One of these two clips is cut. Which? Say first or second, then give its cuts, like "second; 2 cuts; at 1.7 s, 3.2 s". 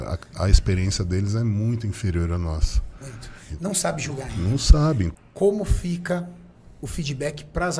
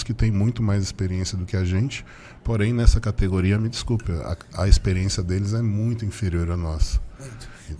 first; 1 cut; at 5.1 s